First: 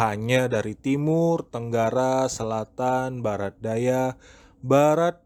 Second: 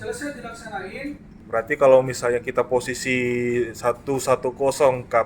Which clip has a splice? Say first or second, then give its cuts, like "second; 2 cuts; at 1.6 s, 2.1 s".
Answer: second; 1 cut; at 1.3 s